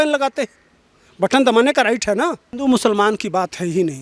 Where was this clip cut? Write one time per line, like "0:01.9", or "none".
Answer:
0:02.5